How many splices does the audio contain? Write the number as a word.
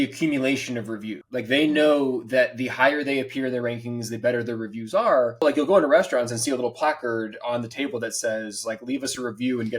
two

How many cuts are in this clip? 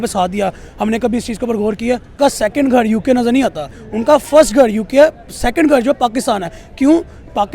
one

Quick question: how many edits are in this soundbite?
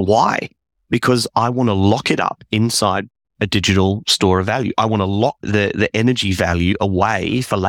one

